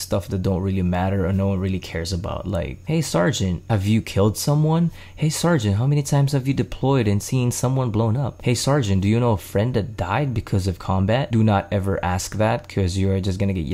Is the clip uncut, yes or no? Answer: no